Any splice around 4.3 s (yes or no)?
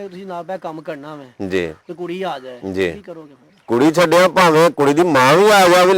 no